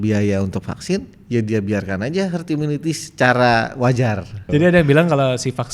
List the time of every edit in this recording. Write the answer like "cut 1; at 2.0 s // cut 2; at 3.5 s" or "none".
cut 1; at 4.4 s